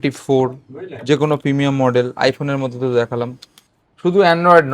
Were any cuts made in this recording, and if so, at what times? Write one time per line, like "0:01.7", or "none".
none